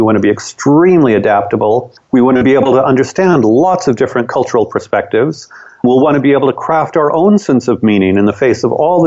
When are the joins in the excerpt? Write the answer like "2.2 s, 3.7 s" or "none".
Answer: 1.9 s, 5.8 s

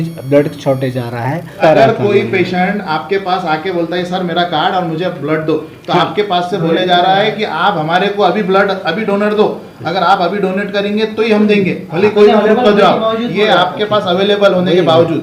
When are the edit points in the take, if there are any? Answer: 1.6 s

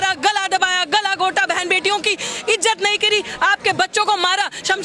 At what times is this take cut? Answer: none

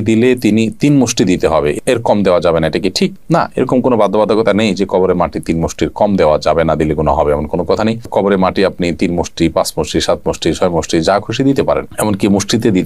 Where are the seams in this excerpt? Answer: none

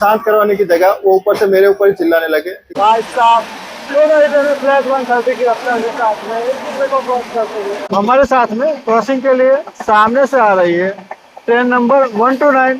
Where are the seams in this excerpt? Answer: 2.6 s, 7.9 s

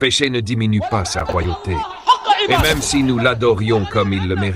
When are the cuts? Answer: 2.5 s

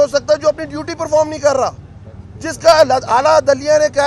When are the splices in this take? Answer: none

